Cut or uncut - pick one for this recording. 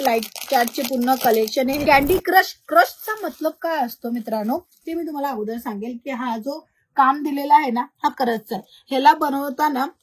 cut